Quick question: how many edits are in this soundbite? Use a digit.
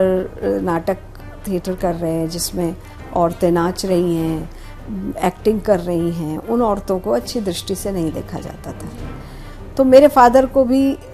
0